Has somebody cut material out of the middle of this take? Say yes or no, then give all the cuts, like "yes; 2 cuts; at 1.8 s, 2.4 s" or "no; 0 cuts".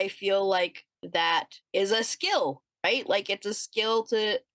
yes; 1 cut; at 1.6 s